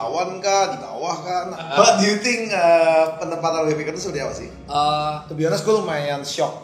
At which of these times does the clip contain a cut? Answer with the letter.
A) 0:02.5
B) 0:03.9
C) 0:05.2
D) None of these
C